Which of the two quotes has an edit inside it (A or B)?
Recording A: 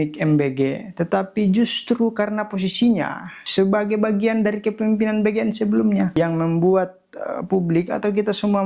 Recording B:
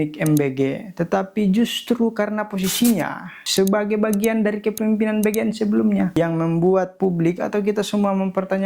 B